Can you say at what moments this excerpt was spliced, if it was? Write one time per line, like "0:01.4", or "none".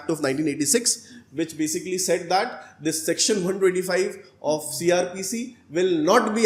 none